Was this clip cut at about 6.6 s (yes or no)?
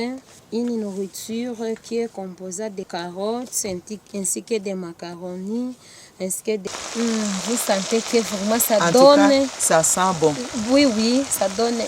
yes